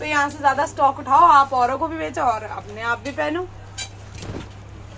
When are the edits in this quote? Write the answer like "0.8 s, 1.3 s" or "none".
none

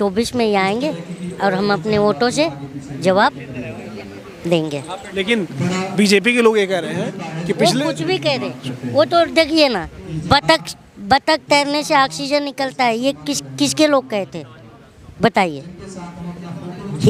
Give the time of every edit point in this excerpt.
none

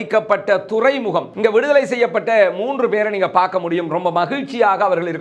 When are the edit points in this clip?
1.3 s

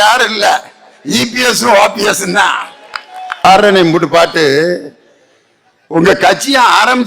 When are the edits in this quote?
3.4 s

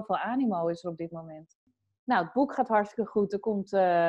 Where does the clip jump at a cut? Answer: 1.7 s

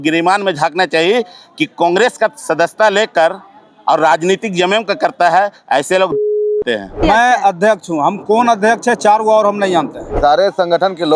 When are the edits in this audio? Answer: 7.0 s, 10.0 s

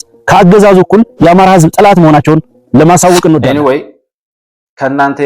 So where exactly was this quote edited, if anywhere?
3.5 s

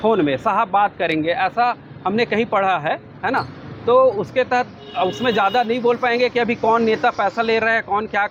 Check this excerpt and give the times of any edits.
none

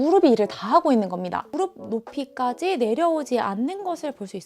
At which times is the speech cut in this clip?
1.5 s

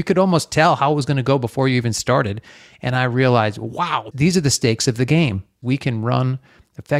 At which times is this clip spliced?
4.0 s, 5.6 s

